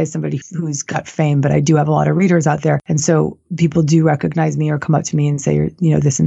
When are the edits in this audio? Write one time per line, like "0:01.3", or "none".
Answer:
0:02.8